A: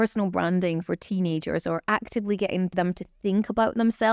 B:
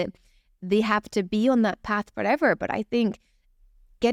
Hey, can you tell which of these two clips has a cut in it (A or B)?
A